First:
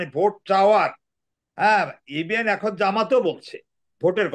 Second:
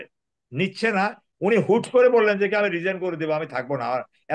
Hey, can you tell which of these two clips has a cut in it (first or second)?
second